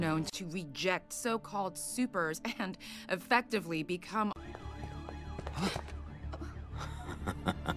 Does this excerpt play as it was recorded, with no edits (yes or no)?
yes